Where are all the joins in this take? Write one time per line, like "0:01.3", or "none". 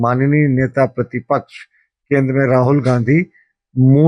none